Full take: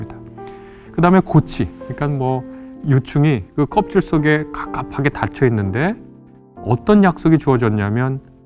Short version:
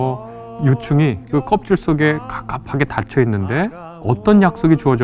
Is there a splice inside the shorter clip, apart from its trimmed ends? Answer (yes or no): yes